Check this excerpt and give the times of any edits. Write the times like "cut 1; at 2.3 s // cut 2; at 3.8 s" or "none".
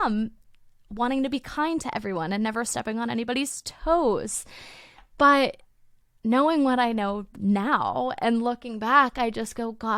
none